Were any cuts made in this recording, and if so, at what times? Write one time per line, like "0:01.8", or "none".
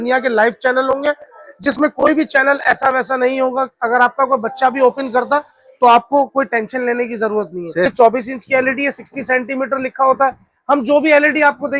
0:07.9